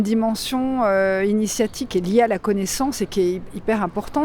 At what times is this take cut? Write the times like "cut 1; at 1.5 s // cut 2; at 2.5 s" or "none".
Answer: cut 1; at 1.8 s